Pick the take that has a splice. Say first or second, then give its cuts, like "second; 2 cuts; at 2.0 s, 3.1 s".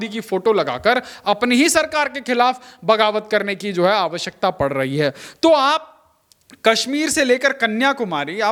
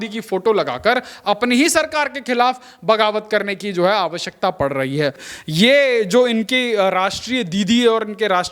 second; 1 cut; at 5.3 s